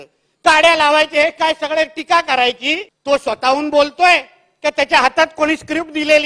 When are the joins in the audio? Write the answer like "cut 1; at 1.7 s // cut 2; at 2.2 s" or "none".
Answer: cut 1; at 2.9 s